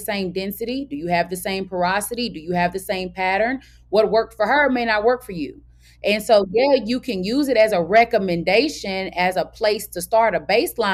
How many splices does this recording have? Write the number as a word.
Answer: zero